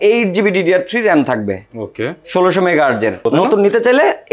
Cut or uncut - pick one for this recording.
cut